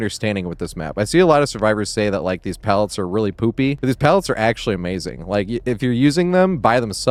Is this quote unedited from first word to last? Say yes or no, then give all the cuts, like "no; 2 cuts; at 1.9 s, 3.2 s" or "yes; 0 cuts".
yes; 0 cuts